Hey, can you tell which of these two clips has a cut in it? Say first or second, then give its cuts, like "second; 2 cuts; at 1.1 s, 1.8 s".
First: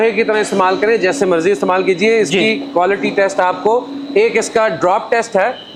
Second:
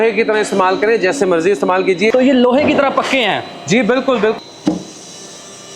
second; 2 cuts; at 2.1 s, 4.4 s